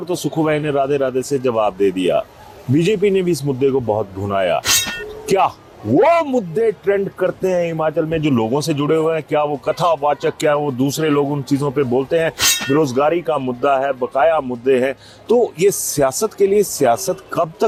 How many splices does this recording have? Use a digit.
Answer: 0